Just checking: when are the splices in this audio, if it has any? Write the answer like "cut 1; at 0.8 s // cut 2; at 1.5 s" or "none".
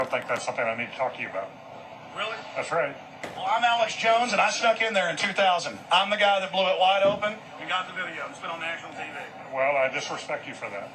cut 1; at 1.6 s